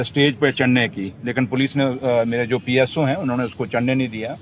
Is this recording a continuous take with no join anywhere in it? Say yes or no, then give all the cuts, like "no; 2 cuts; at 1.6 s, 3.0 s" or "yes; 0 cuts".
yes; 0 cuts